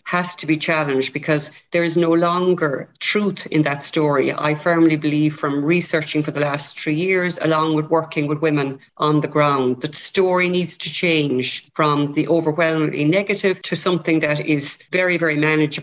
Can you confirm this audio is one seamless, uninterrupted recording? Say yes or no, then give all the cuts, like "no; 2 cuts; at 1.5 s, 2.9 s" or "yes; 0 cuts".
yes; 0 cuts